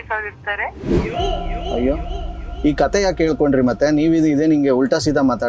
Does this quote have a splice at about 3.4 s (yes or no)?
no